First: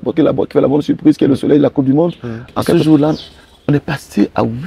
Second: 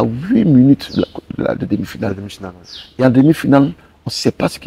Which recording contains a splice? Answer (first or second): first